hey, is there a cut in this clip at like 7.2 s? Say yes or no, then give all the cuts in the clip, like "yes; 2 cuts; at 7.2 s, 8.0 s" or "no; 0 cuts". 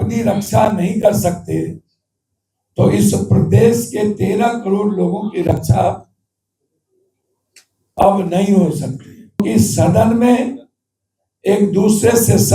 no; 1 cut; at 9.4 s